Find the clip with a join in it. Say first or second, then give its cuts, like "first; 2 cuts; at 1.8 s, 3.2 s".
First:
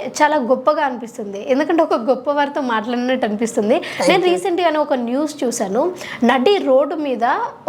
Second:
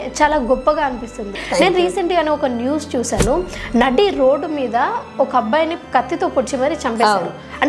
second; 1 cut; at 1.4 s